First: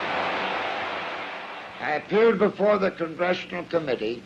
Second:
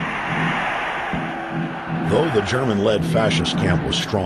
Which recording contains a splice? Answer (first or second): second